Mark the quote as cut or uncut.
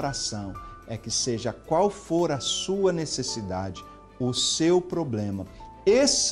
uncut